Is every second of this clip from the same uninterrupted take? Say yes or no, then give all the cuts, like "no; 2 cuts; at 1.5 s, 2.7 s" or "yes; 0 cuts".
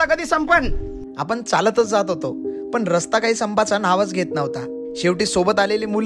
yes; 0 cuts